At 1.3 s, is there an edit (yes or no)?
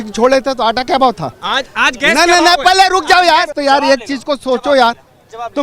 yes